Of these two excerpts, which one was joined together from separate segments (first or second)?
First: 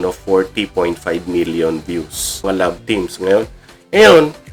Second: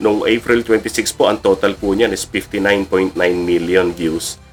first